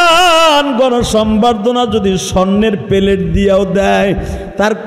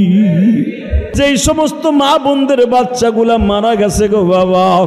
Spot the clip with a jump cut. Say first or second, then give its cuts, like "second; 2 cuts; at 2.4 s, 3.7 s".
second; 1 cut; at 1.1 s